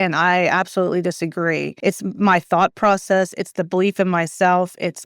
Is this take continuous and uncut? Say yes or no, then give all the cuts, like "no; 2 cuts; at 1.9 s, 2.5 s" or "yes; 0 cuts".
no; 1 cut; at 1.7 s